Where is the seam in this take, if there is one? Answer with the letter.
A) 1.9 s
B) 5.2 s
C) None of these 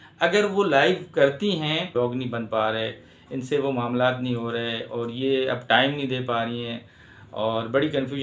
A